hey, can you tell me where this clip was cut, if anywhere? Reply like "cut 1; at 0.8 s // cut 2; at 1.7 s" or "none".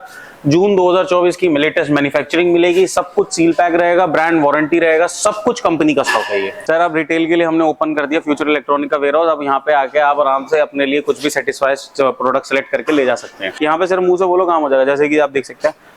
cut 1; at 6.5 s // cut 2; at 13.6 s

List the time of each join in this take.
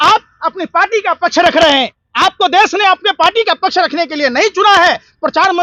cut 1; at 2.0 s

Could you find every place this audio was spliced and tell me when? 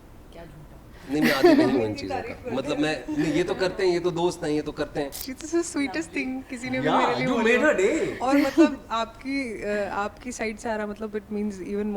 cut 1; at 5.3 s

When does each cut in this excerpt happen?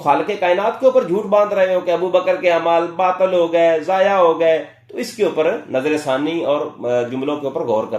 none

